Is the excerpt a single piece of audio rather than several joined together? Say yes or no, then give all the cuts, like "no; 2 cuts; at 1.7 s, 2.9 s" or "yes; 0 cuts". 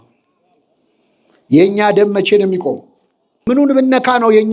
no; 1 cut; at 3.4 s